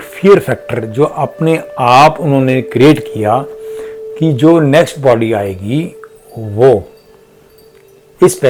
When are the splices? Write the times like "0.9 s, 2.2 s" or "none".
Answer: none